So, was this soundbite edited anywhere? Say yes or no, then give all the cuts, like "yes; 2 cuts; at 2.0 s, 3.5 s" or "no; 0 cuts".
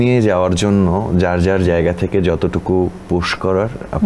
no; 0 cuts